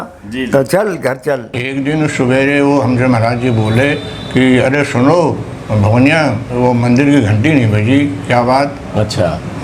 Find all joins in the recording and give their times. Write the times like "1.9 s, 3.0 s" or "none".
1.6 s